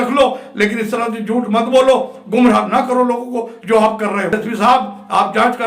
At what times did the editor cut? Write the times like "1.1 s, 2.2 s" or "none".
4.4 s